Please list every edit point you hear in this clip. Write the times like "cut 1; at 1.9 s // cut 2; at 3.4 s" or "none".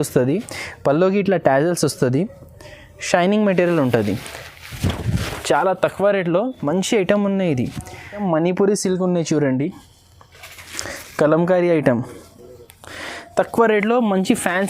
cut 1; at 8.2 s